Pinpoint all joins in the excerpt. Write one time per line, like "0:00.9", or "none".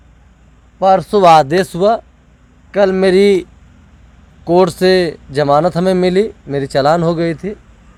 none